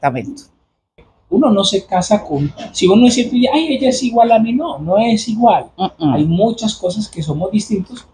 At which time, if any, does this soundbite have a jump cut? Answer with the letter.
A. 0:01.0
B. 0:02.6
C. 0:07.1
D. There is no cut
A